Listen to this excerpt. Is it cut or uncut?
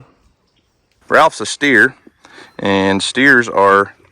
cut